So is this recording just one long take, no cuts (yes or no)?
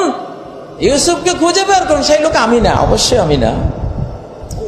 yes